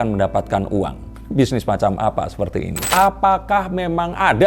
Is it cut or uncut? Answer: cut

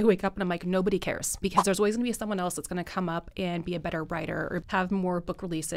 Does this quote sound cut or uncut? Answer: cut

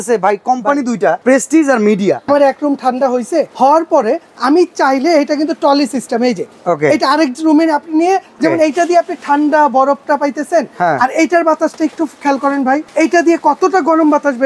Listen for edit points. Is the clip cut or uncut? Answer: cut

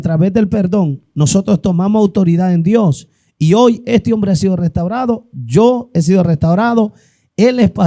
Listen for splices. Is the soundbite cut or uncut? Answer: uncut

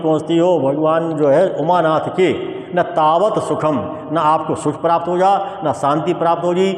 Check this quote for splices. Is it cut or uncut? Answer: uncut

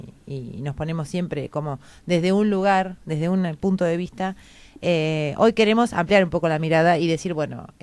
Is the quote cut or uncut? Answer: cut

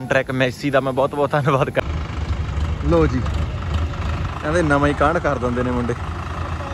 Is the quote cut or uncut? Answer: cut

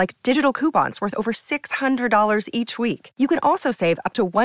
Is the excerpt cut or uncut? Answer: uncut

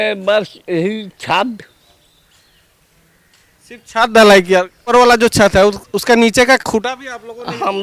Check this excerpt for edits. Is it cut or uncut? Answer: cut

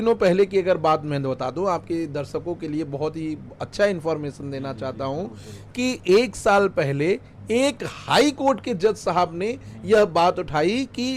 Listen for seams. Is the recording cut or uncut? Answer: uncut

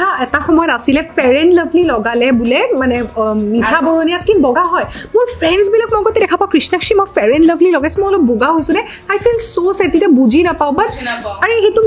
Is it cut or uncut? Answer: uncut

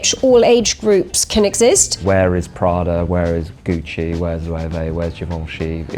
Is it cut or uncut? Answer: cut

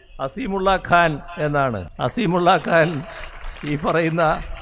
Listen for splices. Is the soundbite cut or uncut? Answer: cut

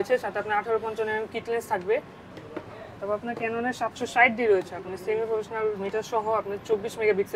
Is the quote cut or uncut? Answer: cut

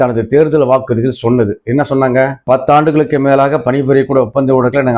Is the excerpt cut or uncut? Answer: uncut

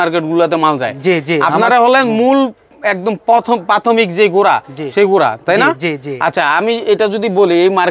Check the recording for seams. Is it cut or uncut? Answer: uncut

